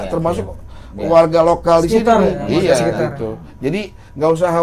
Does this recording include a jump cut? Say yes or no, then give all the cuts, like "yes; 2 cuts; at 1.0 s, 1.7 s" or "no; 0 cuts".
no; 0 cuts